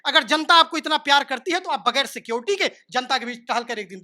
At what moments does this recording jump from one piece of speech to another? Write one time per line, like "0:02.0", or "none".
none